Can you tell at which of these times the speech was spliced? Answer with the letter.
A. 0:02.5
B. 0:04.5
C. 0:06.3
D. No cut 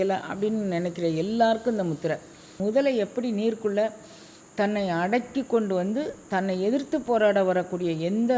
A